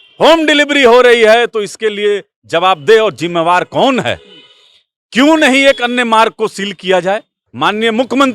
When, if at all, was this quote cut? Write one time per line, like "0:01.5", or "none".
0:07.4